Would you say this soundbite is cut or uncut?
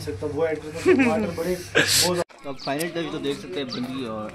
cut